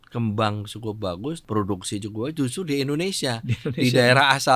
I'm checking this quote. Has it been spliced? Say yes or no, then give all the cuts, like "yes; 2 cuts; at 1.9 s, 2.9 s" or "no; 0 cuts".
yes; 1 cut; at 1.4 s